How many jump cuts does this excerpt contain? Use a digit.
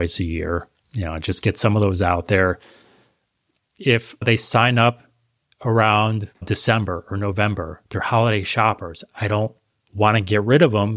2